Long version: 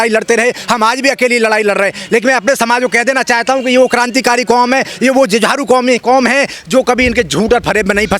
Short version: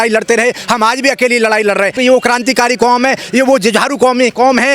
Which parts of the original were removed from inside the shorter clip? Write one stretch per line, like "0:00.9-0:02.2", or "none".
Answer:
0:02.0-0:03.6